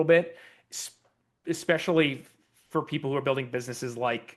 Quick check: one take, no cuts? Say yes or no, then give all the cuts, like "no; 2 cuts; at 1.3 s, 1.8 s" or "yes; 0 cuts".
yes; 0 cuts